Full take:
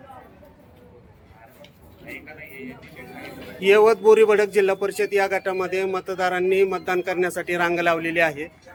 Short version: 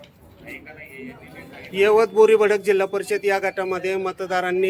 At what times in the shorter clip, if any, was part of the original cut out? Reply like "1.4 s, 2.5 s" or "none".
1.4 s